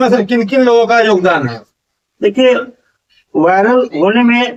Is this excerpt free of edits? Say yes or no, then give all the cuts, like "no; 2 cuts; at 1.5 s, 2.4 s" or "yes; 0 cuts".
yes; 0 cuts